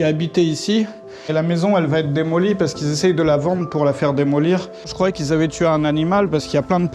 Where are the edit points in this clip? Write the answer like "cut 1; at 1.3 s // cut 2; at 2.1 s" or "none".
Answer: cut 1; at 1.3 s // cut 2; at 4.9 s